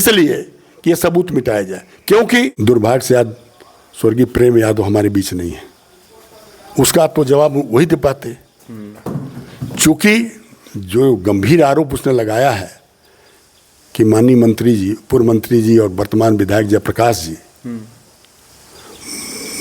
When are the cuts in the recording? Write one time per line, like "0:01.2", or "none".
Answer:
0:02.6